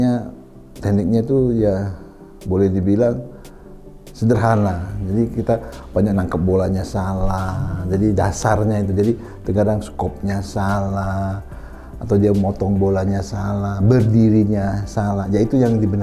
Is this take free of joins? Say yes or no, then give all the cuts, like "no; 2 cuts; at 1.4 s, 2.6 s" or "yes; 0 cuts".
yes; 0 cuts